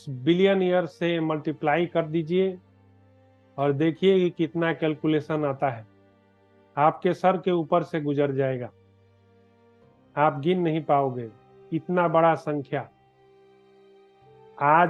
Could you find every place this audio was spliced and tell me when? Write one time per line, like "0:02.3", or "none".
none

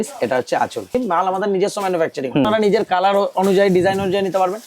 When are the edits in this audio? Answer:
0:00.9
0:02.4

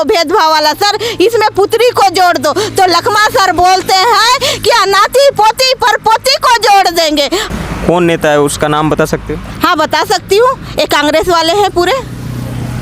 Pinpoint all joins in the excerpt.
0:07.5

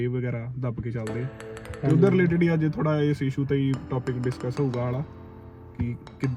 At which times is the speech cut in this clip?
none

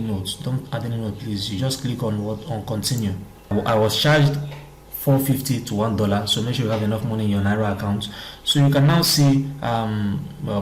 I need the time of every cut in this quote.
0:03.5

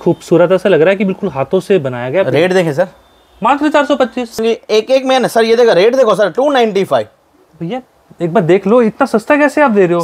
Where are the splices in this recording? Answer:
0:04.4

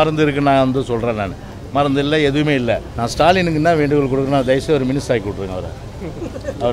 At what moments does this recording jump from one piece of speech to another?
0:03.0

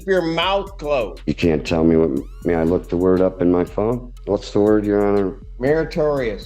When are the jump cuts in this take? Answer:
0:01.2
0:04.1
0:05.4

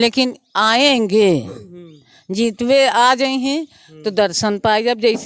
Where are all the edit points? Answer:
none

